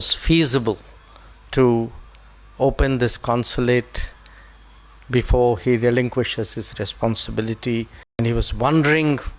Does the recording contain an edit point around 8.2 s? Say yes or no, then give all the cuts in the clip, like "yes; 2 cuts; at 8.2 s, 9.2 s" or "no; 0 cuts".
yes; 1 cut; at 8.2 s